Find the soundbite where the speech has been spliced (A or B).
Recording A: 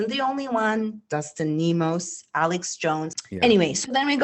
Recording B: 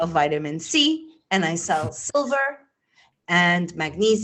A